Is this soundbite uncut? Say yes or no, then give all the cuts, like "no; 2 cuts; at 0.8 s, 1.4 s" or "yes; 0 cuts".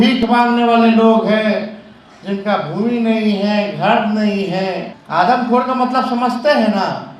no; 1 cut; at 4.9 s